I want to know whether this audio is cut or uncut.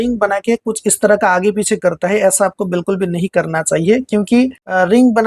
uncut